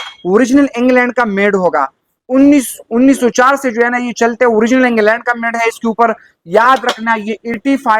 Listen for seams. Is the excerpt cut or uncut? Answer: uncut